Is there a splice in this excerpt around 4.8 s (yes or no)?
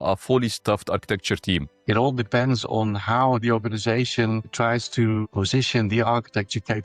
no